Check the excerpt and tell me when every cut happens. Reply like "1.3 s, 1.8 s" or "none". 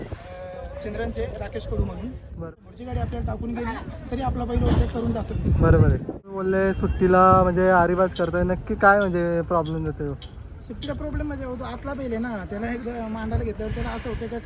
2.4 s, 6.4 s